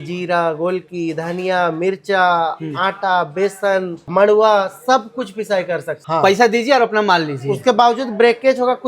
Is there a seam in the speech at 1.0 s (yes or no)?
no